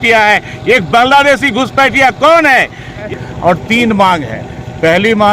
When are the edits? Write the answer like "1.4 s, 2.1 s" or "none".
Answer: 3.0 s

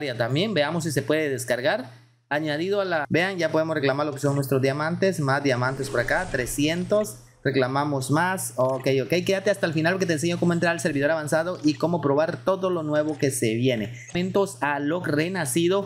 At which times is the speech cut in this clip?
3.0 s, 14.1 s

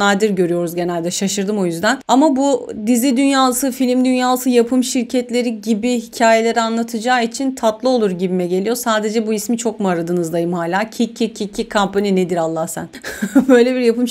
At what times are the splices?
none

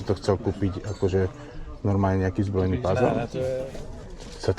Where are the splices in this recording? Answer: 3.6 s

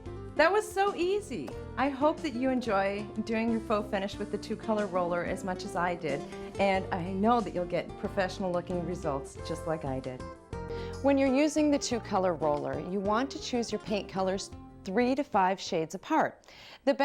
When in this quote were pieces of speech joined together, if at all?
10.7 s

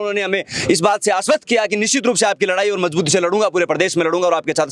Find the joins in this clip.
none

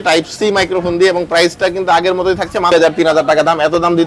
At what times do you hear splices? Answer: 2.7 s

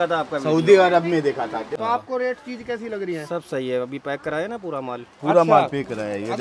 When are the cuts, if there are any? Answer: 1.7 s

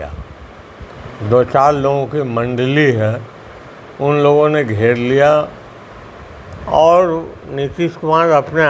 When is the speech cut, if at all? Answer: none

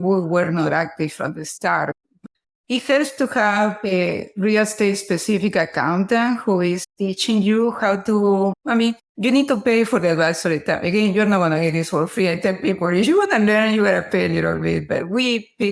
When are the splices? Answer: none

